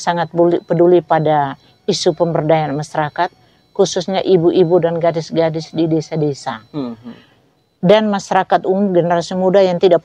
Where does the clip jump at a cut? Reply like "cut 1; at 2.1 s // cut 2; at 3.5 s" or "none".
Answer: none